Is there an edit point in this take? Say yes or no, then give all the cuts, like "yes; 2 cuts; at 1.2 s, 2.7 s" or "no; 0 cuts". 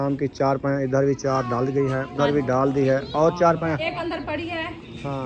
yes; 2 cuts; at 2.1 s, 3.9 s